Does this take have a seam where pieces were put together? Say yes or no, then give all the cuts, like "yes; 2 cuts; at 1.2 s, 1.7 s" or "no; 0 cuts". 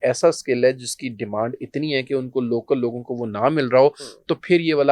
no; 0 cuts